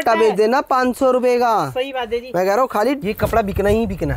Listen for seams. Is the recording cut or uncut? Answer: cut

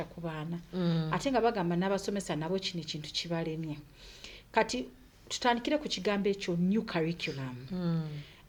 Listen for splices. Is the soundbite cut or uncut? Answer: uncut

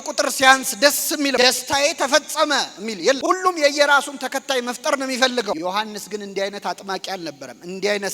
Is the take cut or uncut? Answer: uncut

